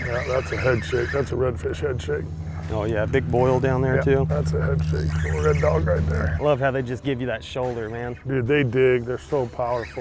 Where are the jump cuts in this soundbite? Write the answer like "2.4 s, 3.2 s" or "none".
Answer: 6.3 s